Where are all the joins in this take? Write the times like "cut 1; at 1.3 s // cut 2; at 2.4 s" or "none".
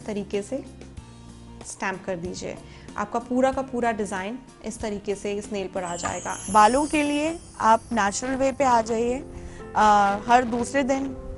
cut 1; at 6.4 s